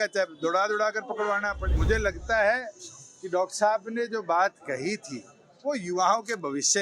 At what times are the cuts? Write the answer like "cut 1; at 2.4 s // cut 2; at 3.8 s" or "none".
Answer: cut 1; at 1.8 s